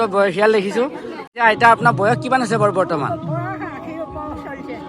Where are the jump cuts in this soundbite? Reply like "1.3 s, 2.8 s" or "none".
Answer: 1.3 s